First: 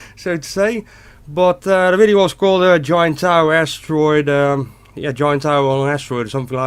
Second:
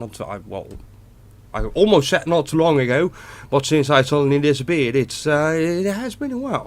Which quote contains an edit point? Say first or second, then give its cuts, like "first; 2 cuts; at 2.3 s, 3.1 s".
second; 1 cut; at 5.7 s